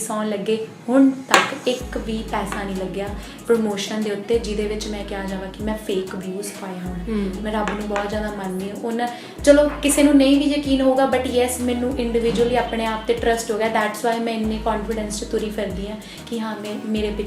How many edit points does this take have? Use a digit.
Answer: 0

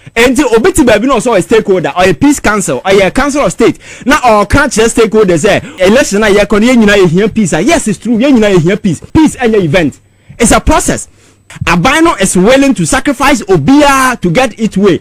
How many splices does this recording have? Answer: 3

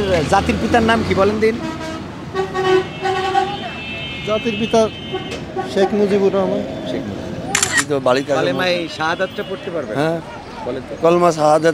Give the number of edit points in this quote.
1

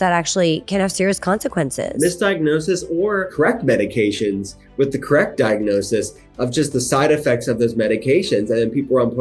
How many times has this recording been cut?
2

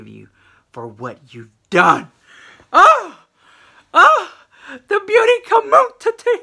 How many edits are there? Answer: 0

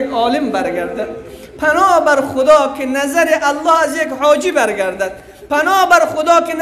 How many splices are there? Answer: 0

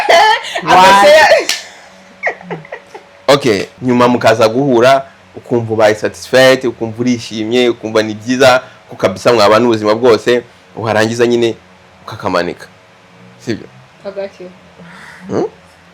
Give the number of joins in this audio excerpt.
1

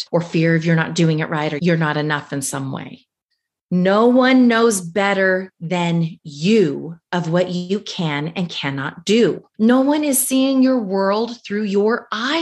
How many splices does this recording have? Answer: 1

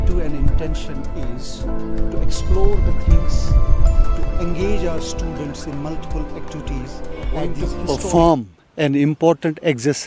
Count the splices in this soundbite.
1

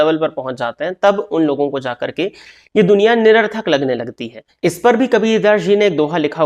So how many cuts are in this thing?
1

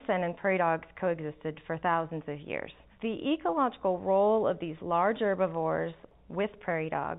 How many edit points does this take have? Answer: 2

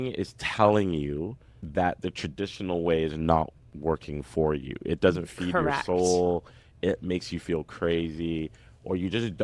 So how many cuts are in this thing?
0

